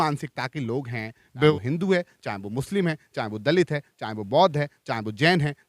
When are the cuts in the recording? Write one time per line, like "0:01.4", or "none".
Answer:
0:01.5

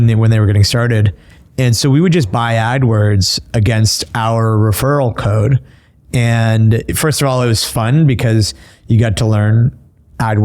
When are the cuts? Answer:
0:06.9

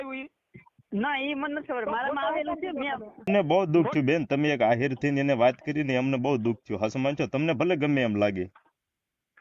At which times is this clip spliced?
0:03.3

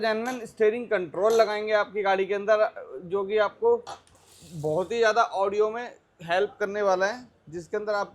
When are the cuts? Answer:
none

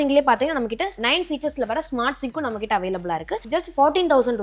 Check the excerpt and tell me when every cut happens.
none

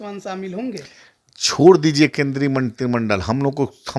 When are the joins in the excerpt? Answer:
none

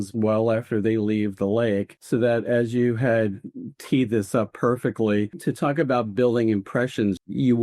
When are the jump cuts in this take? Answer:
0:01.9
0:05.4

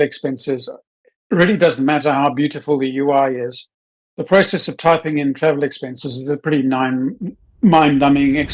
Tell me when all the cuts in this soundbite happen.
0:07.4

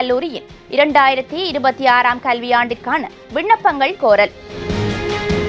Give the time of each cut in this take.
0:04.6

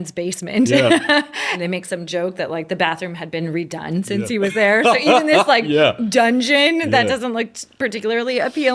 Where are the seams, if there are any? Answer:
0:01.5

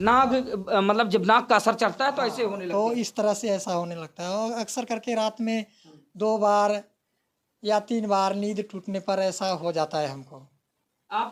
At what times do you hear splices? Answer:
none

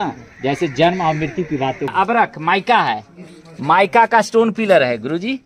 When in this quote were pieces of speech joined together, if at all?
0:01.9

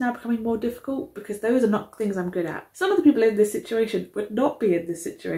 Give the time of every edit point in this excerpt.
0:02.6

